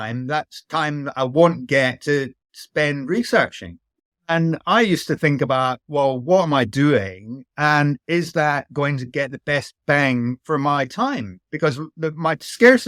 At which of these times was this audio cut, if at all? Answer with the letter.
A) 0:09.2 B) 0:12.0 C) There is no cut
C